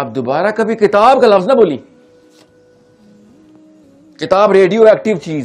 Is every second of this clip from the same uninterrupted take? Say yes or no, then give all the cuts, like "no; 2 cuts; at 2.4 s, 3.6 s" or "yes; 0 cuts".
no; 2 cuts; at 1.8 s, 4.2 s